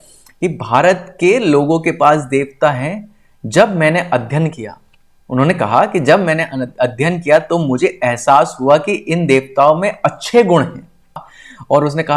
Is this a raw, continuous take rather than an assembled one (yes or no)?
no